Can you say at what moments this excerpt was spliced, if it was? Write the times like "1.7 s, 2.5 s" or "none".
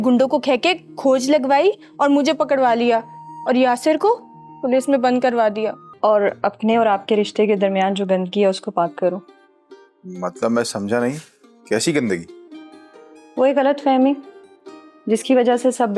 5.8 s